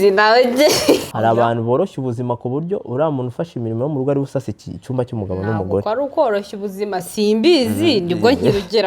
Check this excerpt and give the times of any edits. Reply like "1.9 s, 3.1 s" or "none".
1.1 s